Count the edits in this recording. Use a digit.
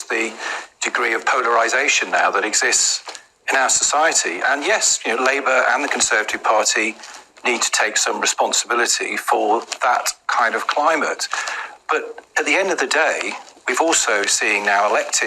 2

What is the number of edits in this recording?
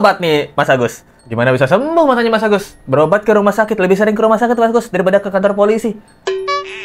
0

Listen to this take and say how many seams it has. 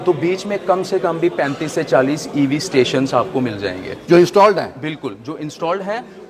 0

